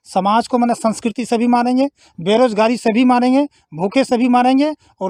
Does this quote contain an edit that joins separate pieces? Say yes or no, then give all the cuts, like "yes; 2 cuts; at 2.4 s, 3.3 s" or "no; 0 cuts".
no; 0 cuts